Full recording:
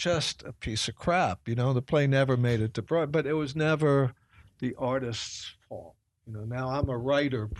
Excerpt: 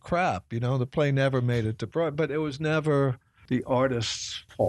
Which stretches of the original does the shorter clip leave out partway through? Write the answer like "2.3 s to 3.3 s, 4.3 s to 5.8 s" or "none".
4.2 s to 4.4 s